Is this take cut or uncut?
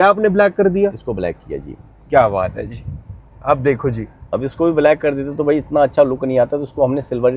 uncut